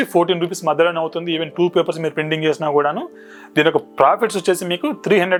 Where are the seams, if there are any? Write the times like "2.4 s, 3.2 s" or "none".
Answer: none